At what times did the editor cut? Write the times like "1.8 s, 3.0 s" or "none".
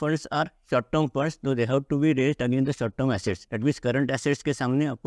3.5 s